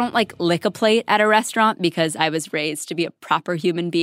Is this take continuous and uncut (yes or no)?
yes